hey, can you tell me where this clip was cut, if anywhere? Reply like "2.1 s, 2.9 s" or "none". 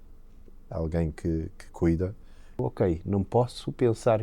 2.6 s

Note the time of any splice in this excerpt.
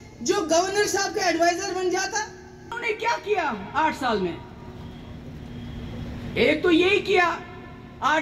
2.8 s

